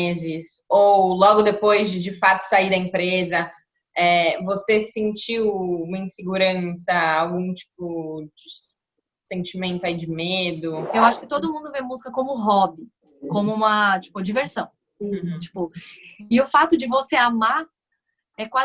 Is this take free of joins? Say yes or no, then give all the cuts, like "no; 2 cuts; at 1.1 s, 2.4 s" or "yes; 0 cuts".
no; 1 cut; at 11.0 s